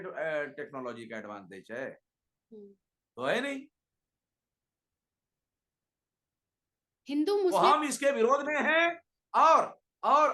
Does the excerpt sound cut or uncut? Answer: uncut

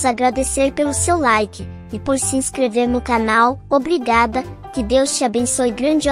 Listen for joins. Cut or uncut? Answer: uncut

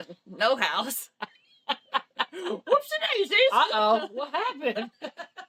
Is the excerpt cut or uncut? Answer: uncut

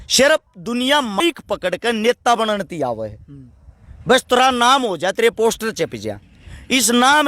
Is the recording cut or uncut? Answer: cut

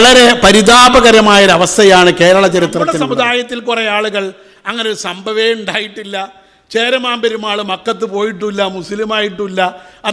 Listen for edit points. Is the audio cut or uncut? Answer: cut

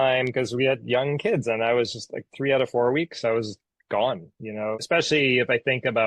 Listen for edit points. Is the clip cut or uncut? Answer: cut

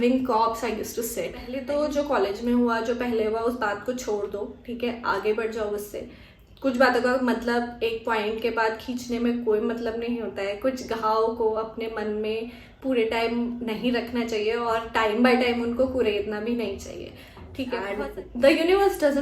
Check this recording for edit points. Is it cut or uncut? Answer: cut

